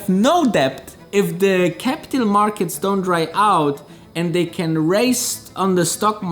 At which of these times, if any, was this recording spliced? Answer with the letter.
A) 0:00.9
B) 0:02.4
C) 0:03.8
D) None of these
A